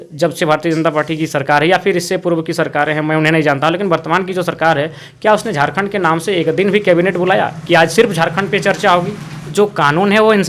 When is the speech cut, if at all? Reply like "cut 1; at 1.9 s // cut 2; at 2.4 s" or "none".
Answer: cut 1; at 9.4 s